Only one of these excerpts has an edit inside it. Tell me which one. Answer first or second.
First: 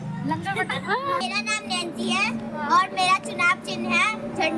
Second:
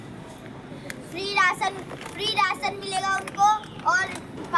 first